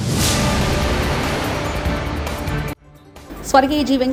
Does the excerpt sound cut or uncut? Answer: uncut